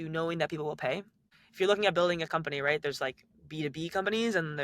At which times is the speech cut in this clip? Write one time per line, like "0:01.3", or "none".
0:01.3